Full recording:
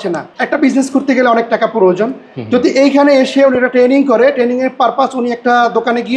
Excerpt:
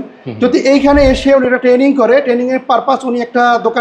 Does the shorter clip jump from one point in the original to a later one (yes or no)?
no